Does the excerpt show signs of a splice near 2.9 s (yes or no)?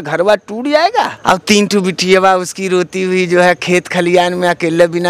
no